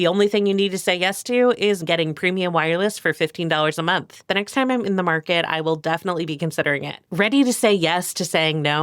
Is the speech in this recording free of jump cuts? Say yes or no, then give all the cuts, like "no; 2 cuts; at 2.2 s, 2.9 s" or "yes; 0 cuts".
no; 3 cuts; at 1.8 s, 4.3 s, 7.0 s